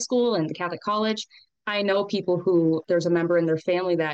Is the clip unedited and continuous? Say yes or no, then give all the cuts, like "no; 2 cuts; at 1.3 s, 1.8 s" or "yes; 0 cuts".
no; 1 cut; at 2.8 s